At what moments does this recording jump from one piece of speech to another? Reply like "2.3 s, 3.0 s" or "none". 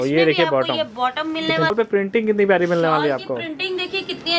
1.7 s